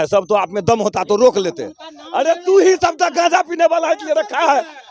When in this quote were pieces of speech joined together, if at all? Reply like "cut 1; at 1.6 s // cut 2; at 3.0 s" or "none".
none